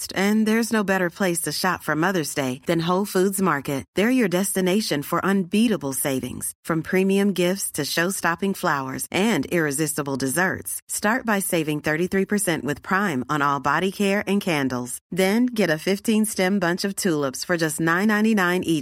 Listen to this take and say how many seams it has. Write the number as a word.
zero